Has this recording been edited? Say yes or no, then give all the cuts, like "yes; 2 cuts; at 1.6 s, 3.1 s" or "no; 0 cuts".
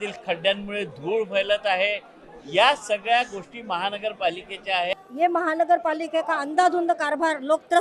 yes; 1 cut; at 4.9 s